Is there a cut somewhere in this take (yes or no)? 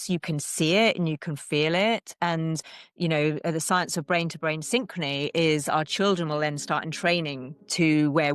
no